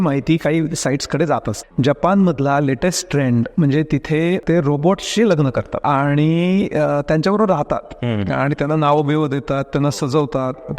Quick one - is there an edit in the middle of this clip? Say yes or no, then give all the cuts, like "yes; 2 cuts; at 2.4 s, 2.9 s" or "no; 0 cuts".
yes; 3 cuts; at 1.6 s, 4.4 s, 5.7 s